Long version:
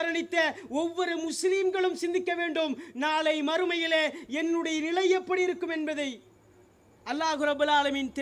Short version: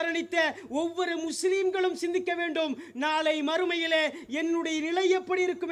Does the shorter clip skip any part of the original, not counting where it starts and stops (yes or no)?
no